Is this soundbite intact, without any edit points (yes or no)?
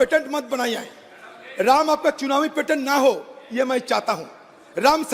yes